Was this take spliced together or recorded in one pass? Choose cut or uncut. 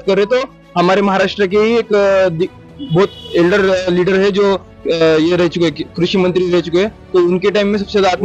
uncut